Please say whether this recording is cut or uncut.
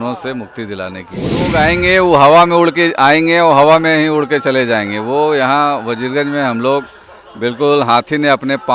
cut